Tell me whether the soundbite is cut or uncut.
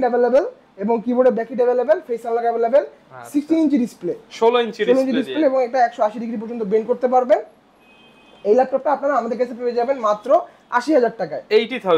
uncut